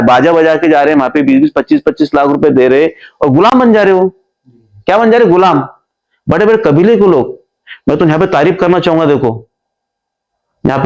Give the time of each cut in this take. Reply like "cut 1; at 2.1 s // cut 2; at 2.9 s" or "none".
none